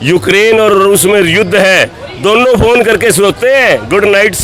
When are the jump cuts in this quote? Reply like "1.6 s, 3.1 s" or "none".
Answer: none